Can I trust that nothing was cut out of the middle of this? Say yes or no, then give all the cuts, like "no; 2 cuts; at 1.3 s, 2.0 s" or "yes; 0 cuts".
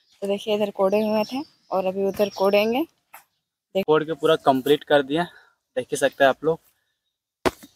no; 1 cut; at 3.8 s